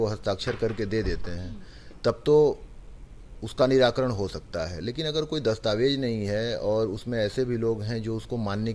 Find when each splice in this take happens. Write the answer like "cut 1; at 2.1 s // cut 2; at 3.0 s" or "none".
none